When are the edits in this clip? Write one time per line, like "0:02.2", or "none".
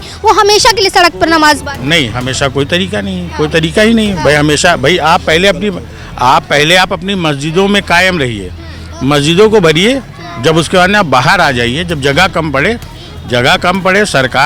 none